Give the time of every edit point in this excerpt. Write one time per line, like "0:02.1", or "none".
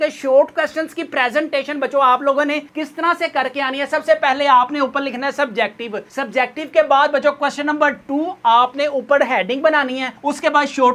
none